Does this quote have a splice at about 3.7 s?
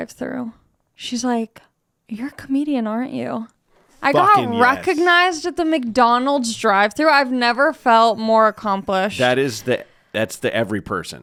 no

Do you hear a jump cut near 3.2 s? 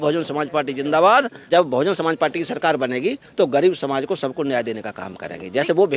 no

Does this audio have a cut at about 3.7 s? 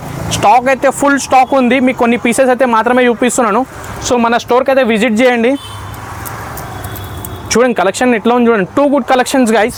no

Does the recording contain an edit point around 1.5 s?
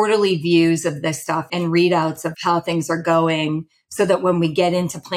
yes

